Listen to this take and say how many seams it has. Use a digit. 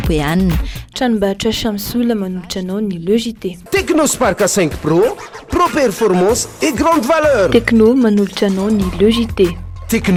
0